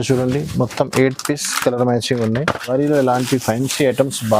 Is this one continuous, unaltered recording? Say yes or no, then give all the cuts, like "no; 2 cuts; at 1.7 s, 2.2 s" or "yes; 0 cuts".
no; 1 cut; at 2.7 s